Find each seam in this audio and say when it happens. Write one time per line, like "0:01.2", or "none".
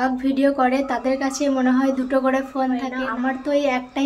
0:03.0